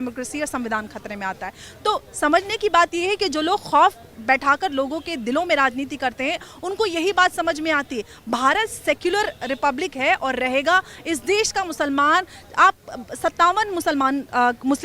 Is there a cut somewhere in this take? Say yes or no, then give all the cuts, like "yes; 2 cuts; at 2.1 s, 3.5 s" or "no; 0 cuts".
no; 0 cuts